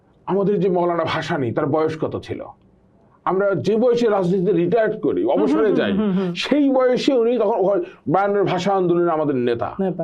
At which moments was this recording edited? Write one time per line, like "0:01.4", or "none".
none